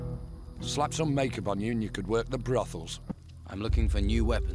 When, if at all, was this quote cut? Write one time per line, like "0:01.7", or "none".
0:03.0

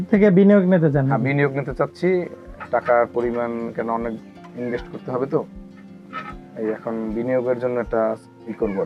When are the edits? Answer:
none

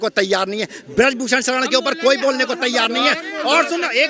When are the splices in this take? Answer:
none

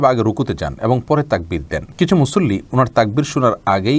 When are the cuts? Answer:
0:01.8

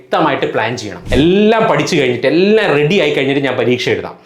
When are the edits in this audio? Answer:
0:01.0

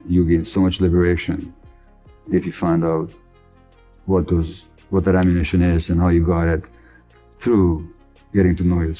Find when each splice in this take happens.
0:06.8

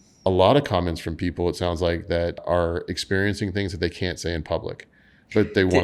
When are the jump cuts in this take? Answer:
0:02.4

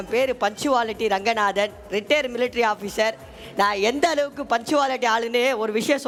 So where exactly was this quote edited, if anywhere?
none

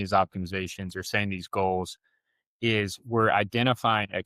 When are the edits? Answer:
none

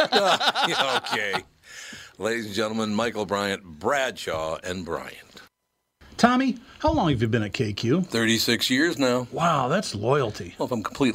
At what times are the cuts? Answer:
0:06.0

